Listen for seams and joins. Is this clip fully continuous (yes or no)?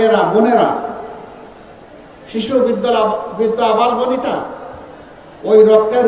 yes